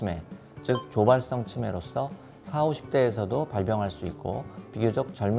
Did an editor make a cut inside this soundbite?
no; 0 cuts

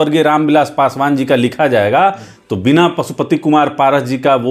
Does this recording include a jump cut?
no; 0 cuts

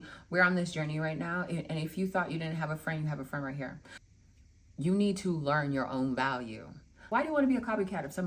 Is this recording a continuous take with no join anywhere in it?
no; 2 cuts; at 4.2 s, 7.0 s

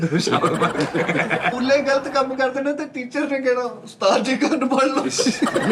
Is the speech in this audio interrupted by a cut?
yes; 1 cut; at 1.6 s

